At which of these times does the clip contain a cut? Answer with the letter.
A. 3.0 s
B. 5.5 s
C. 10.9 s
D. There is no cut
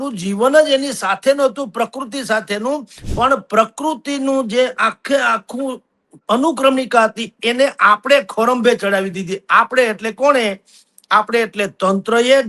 A